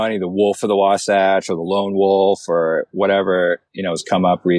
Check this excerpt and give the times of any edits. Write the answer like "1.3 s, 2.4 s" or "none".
3.7 s